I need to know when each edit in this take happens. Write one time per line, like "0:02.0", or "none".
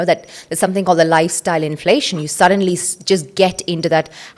none